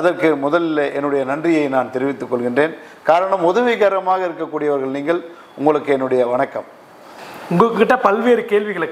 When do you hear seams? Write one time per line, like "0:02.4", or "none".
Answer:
none